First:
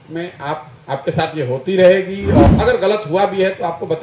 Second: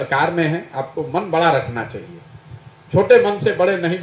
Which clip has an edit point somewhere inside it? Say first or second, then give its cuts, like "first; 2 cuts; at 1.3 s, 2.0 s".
first; 1 cut; at 2.5 s